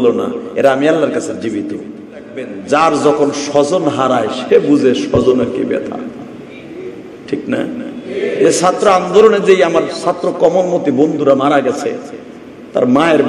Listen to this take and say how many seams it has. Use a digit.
1